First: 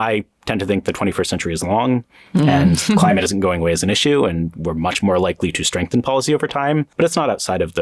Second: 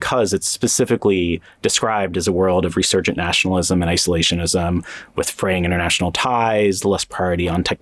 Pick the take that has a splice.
first; 1 cut; at 6.9 s

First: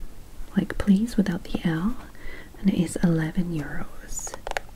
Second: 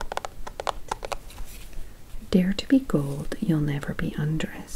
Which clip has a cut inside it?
second; 1 cut; at 1.3 s

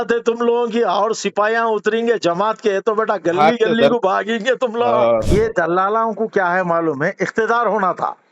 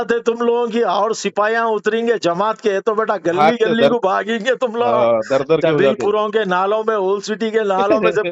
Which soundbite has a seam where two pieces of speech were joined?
first; 1 cut; at 5.2 s

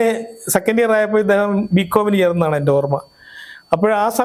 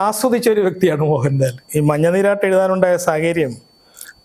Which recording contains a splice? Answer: second; 1 cut; at 1.6 s

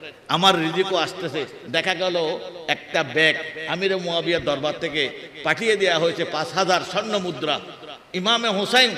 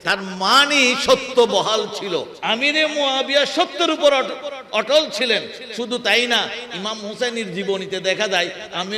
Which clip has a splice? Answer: second; 1 cut; at 2.3 s

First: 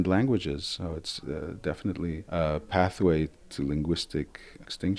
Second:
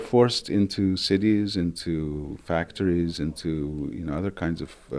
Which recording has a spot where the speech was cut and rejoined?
first; 1 cut; at 3.3 s

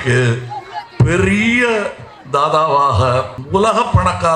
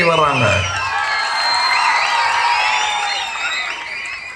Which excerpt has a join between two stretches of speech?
first; 1 cut; at 3.4 s

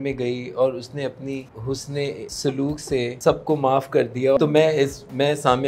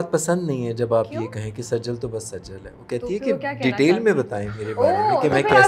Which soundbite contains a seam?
first; 3 cuts; at 1.9 s, 3.2 s, 4.4 s

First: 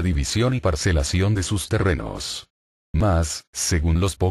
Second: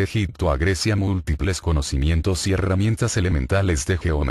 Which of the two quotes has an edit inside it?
second; 1 cut; at 2.1 s

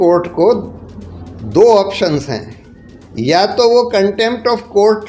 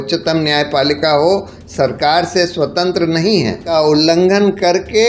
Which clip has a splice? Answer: second; 1 cut; at 3.7 s

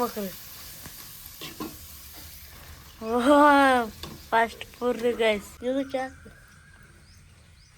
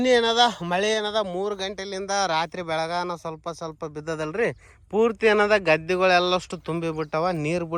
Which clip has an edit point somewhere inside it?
first; 1 cut; at 5.5 s

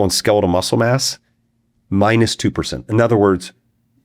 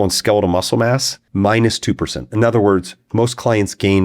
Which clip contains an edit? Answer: second; 2 cuts; at 1.2 s, 3.0 s

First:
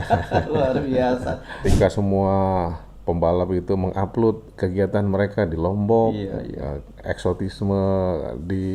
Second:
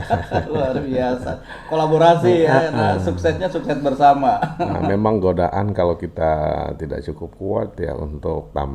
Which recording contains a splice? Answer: first; 1 cut; at 1.6 s

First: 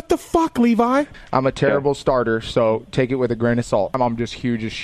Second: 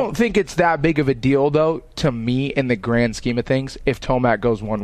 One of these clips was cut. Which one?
first; 2 cuts; at 1.1 s, 3.9 s

